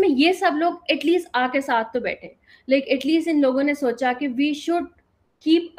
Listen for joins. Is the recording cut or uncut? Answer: uncut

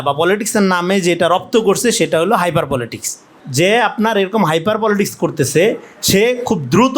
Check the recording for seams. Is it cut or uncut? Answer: cut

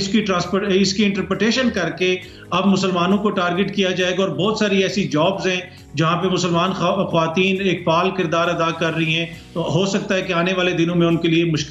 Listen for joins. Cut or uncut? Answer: uncut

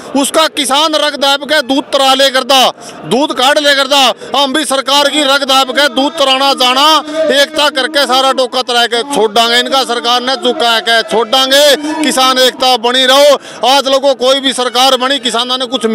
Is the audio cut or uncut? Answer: uncut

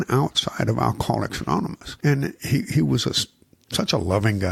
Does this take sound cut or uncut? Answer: cut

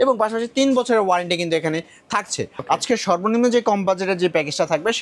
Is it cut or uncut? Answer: cut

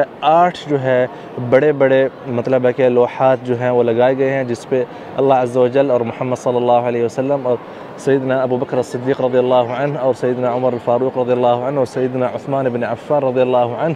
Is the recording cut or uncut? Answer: uncut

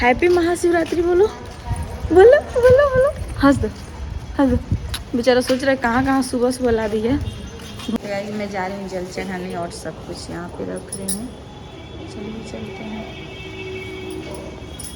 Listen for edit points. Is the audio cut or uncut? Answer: cut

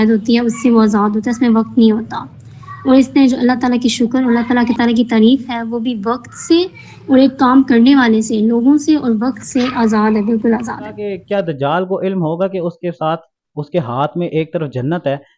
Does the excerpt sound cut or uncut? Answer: cut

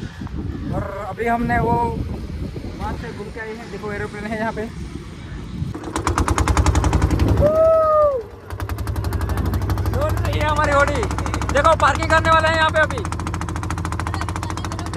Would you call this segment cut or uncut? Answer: cut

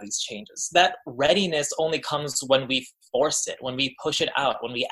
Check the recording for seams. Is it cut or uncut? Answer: uncut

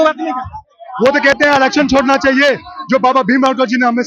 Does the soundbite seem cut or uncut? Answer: uncut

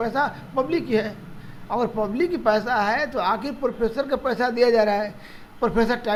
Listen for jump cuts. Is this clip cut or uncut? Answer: uncut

